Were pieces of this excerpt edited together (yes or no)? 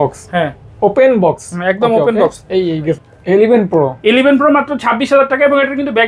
yes